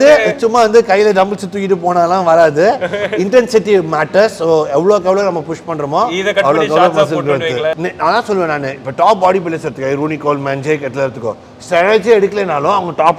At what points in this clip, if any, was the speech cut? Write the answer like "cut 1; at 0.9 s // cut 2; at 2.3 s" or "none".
cut 1; at 7.8 s